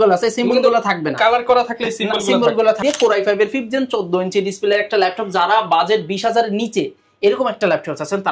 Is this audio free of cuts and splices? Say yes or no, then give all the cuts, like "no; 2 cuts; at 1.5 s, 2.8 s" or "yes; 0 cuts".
no; 1 cut; at 2.8 s